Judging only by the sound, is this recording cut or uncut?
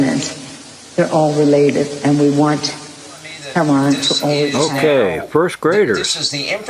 cut